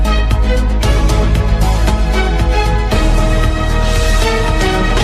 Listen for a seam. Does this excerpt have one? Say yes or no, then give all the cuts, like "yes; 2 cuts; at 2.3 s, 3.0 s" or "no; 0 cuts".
no; 0 cuts